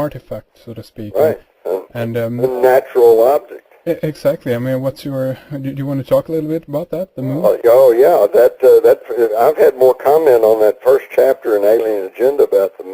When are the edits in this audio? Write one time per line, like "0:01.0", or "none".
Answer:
0:10.9